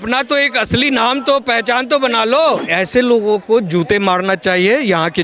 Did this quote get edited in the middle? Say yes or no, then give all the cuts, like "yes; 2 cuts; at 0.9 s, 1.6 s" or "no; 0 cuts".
yes; 1 cut; at 2.6 s